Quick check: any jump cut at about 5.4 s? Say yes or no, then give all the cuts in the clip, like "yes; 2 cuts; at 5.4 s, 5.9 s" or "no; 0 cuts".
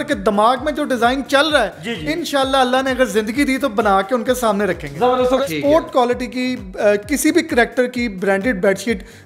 yes; 1 cut; at 5.4 s